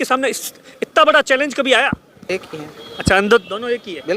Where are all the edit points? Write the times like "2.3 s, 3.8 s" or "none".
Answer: 2.3 s